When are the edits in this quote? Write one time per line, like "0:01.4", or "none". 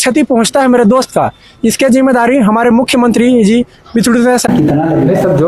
0:04.5